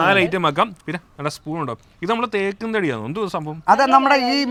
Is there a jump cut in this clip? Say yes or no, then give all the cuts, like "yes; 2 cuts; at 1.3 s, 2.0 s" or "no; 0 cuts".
no; 0 cuts